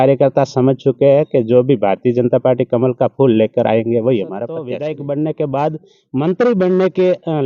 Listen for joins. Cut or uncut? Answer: cut